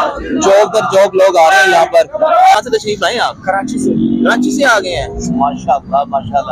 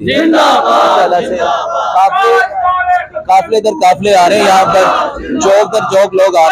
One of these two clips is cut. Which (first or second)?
first